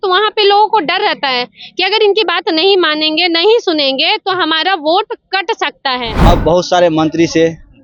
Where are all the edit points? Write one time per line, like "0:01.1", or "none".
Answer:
0:06.1